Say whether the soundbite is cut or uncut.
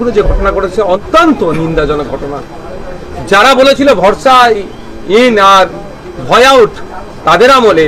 cut